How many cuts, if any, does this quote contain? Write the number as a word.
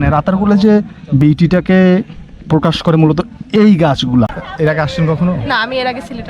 one